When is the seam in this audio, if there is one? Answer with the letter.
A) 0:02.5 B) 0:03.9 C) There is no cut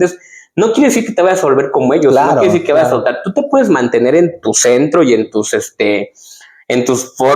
C